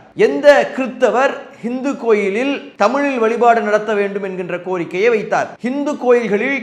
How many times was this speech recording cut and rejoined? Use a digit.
2